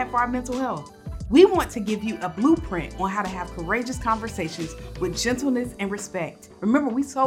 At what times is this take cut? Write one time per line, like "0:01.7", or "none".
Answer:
none